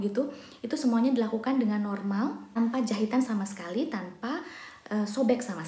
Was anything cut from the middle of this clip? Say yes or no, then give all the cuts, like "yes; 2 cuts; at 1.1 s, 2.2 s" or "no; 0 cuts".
yes; 1 cut; at 2.5 s